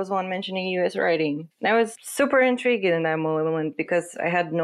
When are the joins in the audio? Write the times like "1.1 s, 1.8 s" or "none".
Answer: 1.6 s